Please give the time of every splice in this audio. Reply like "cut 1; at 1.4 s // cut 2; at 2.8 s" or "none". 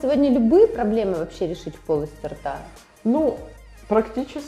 none